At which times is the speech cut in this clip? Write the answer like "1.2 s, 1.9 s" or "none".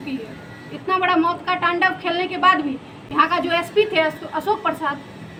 none

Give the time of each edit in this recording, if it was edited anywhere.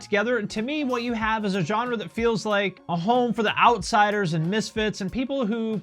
2.8 s

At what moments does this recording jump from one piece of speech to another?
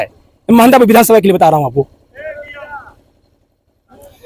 none

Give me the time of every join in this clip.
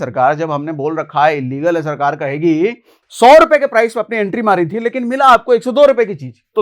2.9 s

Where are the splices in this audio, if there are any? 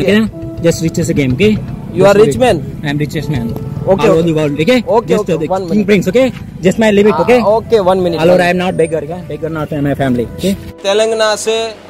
10.8 s

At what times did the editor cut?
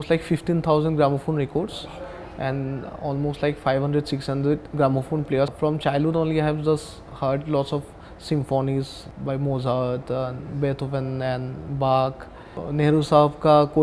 5.5 s, 9.0 s, 12.6 s

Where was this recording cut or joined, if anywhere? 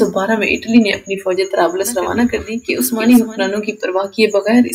2.6 s

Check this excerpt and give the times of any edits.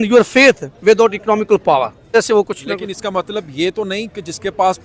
2.1 s

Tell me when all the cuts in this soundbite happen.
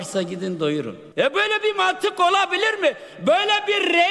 1.0 s

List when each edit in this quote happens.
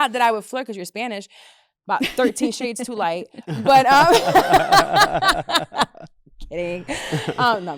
none

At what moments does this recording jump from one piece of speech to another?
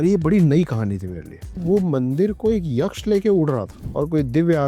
1.6 s

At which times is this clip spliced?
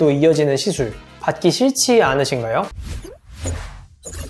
2.8 s

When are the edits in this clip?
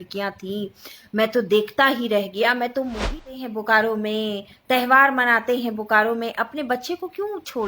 3.3 s

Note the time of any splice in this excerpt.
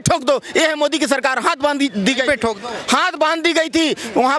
none

